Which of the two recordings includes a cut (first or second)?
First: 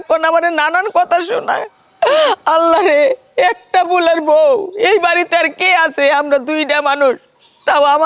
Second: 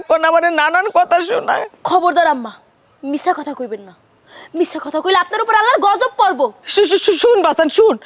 second